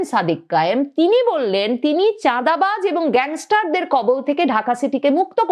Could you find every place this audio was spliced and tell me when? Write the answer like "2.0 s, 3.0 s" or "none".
none